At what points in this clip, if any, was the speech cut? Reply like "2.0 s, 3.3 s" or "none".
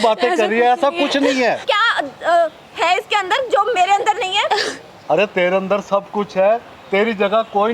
1.6 s